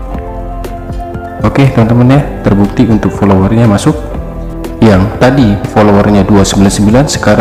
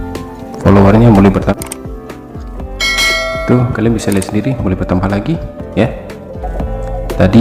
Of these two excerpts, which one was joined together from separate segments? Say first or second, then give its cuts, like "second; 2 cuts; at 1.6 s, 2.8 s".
second; 1 cut; at 1.5 s